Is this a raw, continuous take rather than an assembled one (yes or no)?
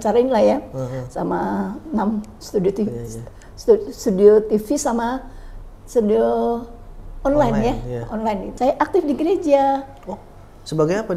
no